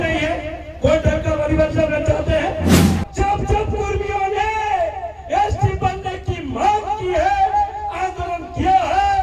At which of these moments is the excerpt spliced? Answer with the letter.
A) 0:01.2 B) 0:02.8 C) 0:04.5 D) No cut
B